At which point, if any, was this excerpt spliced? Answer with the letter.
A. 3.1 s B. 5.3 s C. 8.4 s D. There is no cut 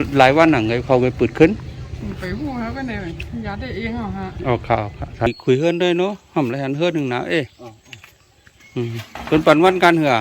B